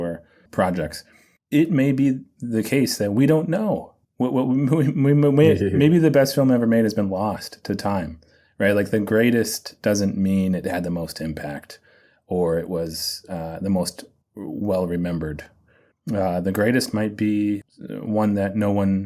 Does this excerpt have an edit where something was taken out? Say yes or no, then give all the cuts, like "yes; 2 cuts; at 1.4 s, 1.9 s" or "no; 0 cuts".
yes; 1 cut; at 17.7 s